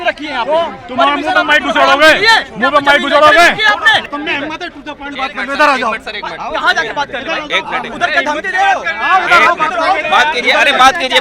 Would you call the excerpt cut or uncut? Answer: cut